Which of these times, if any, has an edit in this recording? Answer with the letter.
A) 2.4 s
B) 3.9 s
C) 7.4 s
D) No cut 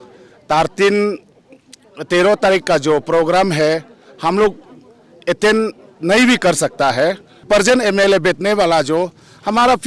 C